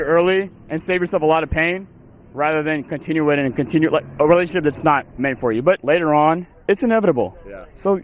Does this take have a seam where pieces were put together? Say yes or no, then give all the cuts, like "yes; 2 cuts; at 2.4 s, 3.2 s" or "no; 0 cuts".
no; 0 cuts